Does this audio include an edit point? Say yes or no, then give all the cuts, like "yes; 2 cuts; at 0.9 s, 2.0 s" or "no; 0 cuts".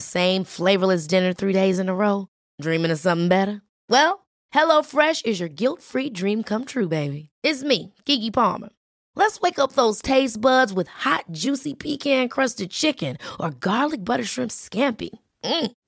no; 0 cuts